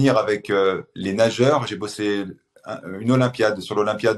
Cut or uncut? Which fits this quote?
cut